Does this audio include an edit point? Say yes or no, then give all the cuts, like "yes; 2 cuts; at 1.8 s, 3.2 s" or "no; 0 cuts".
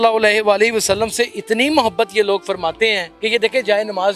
yes; 1 cut; at 3.1 s